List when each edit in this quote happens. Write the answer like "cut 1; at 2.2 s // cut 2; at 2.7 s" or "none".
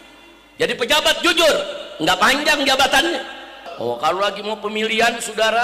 cut 1; at 3.6 s